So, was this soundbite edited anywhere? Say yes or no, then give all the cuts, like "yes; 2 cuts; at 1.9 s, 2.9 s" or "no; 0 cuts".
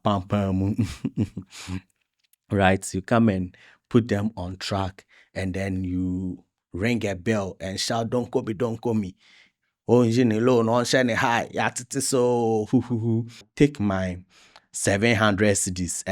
yes; 1 cut; at 13.4 s